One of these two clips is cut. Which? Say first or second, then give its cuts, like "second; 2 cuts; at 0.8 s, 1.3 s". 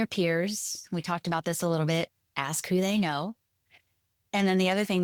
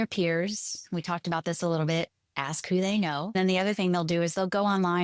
second; 1 cut; at 3.4 s